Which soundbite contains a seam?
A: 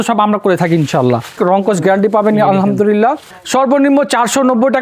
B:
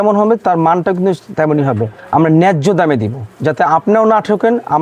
A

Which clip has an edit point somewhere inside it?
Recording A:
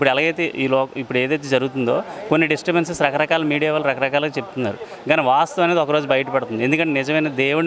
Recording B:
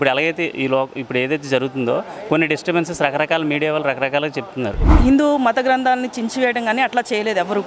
B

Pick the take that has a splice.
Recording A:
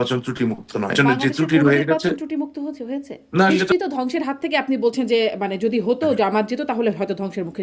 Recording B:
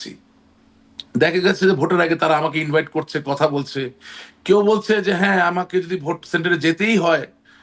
A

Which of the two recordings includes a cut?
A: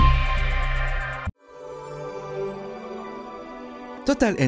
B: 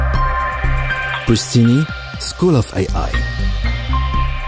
A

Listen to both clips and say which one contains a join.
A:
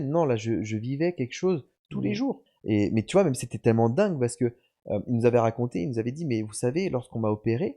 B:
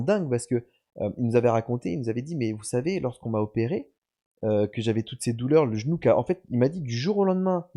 A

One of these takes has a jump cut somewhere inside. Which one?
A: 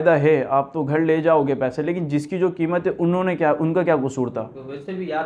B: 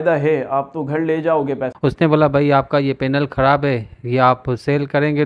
B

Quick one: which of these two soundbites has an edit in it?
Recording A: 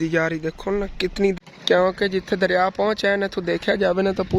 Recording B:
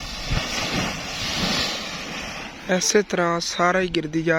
A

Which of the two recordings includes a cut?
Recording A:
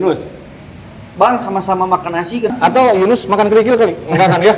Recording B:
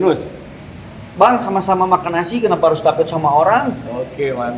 A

